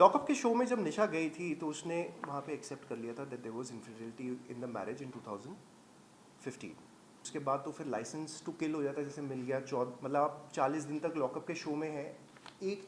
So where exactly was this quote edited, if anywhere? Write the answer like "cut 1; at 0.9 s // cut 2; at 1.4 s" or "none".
cut 1; at 7.2 s